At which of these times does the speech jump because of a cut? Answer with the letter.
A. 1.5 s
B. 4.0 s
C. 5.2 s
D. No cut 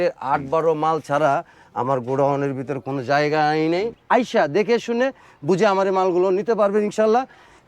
B